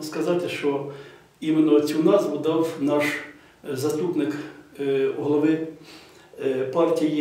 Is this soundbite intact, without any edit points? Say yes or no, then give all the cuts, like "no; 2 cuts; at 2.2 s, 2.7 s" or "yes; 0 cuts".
yes; 0 cuts